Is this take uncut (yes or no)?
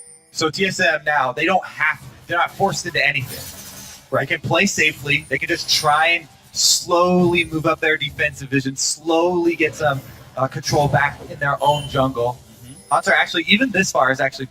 no